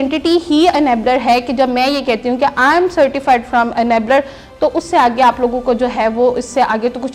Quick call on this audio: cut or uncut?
uncut